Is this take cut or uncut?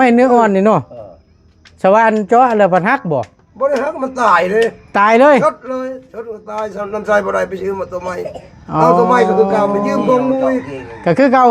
uncut